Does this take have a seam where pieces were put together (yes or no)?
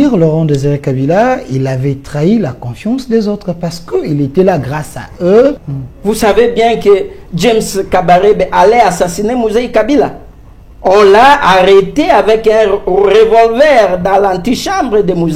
yes